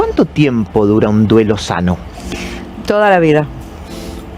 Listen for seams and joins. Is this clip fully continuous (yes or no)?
no